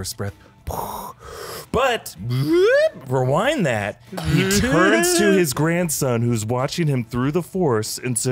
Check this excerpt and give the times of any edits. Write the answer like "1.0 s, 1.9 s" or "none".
none